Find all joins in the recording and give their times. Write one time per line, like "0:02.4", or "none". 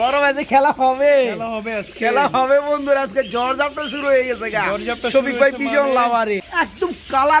0:06.5